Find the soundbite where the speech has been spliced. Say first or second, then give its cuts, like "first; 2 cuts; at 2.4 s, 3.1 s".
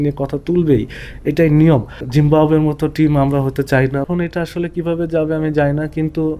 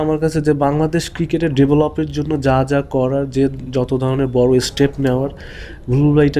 first; 2 cuts; at 2.0 s, 4.0 s